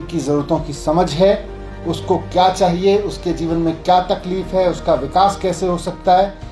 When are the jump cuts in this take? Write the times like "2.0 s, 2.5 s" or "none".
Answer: none